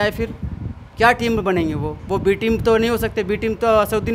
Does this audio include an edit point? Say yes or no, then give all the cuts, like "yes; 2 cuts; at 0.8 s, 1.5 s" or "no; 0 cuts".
no; 0 cuts